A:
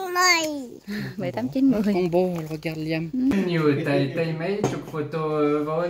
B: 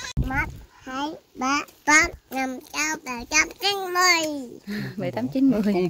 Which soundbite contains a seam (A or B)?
A